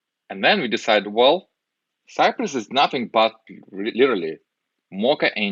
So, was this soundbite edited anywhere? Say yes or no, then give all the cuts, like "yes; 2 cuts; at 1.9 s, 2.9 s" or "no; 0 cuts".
no; 0 cuts